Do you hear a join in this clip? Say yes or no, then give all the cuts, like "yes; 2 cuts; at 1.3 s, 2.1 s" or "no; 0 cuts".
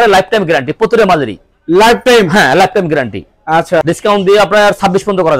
yes; 1 cut; at 3.8 s